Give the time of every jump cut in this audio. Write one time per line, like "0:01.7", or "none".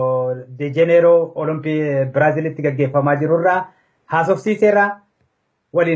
0:01.6